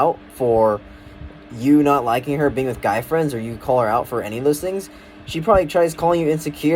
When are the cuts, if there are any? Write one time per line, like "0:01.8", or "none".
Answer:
none